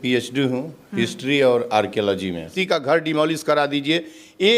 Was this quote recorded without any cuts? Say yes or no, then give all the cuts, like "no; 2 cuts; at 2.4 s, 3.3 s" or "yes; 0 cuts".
no; 1 cut; at 2.6 s